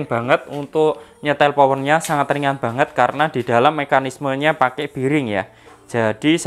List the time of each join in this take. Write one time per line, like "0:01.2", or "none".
none

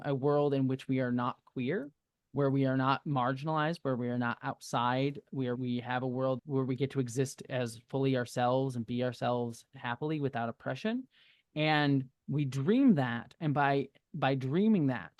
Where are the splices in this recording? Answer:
0:05.6
0:06.4

